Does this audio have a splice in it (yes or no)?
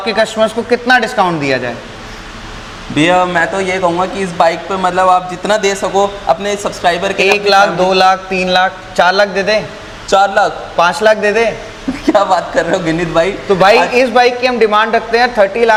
no